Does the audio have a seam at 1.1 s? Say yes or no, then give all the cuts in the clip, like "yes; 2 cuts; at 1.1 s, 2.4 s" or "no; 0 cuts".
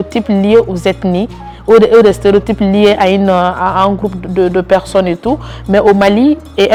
no; 0 cuts